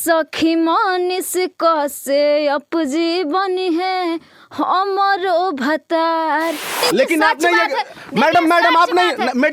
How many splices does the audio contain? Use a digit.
1